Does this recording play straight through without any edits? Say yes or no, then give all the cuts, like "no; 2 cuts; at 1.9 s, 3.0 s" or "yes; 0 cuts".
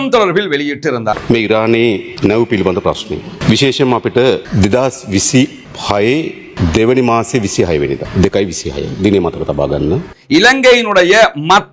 no; 8 cuts; at 1.2 s, 2.1 s, 3.3 s, 4.5 s, 5.7 s, 6.4 s, 8.1 s, 10.1 s